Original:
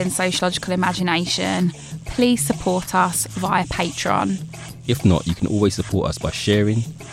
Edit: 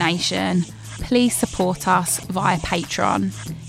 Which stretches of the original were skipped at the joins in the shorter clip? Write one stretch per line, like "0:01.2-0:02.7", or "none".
none